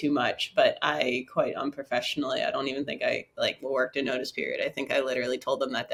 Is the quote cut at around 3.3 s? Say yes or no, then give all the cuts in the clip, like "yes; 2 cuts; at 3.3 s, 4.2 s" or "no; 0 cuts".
no; 0 cuts